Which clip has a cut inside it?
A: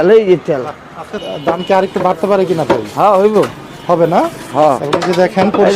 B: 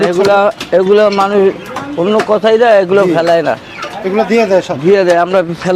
A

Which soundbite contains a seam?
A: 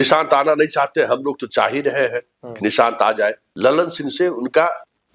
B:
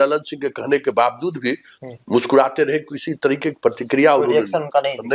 A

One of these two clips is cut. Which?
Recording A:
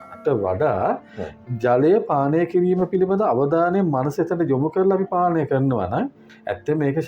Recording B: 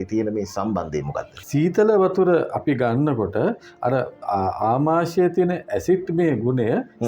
B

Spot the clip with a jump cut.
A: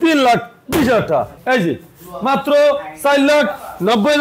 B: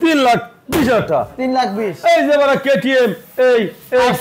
A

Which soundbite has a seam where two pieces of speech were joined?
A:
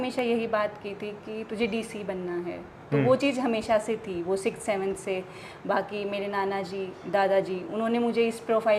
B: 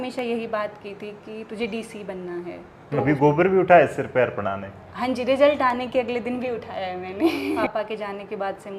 B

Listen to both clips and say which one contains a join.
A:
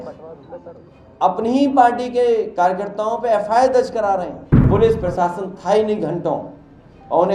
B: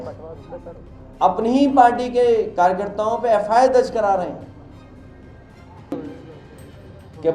A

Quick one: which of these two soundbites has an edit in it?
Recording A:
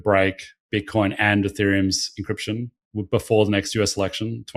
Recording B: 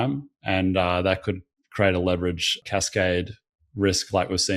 B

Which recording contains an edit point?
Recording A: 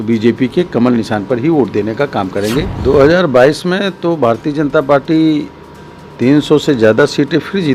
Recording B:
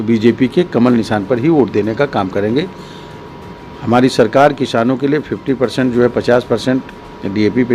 A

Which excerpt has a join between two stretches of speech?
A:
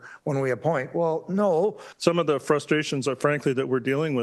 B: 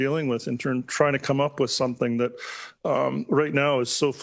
A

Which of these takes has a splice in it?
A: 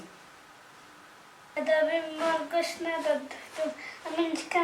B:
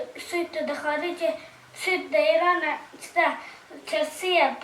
A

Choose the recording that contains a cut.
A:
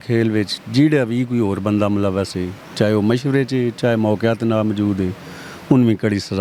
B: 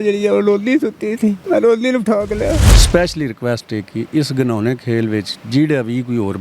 B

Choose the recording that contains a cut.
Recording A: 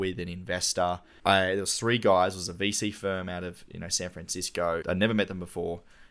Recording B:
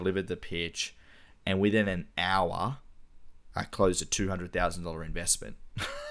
A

